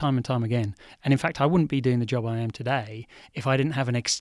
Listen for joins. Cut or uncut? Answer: uncut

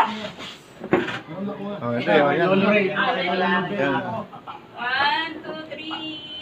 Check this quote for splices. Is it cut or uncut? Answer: uncut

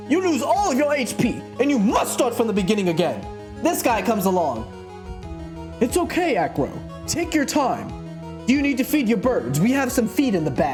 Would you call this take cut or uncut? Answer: uncut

